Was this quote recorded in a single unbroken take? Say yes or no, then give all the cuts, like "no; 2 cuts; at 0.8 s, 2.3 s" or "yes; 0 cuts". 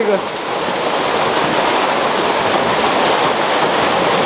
yes; 0 cuts